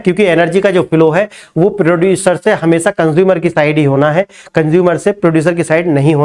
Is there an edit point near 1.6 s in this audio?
no; 0 cuts

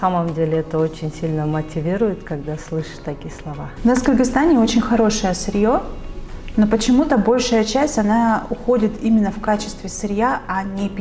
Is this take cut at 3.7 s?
yes; 1 cut; at 3.7 s

